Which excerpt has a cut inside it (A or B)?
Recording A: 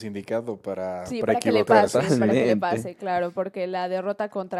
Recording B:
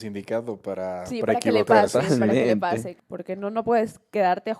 B